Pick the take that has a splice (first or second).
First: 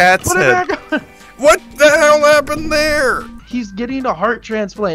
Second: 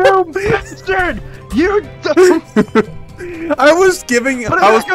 first